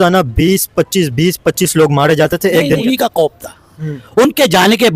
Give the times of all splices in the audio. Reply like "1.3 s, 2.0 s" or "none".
2.8 s